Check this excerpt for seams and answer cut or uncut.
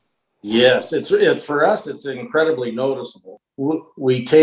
cut